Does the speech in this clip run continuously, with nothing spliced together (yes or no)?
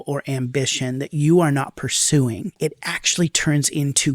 no